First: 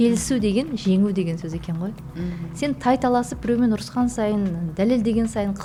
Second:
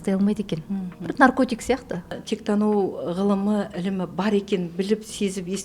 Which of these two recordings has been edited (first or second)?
second